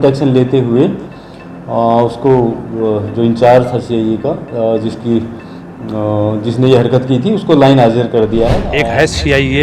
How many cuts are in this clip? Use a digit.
1